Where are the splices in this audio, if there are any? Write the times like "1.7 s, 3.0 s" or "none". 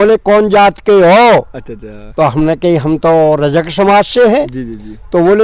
none